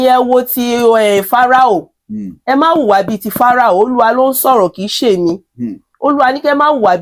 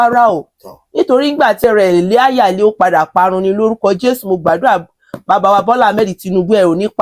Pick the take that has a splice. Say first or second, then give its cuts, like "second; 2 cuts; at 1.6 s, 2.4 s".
second; 1 cut; at 1.6 s